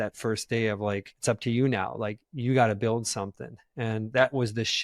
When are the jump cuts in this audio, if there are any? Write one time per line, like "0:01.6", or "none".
0:01.1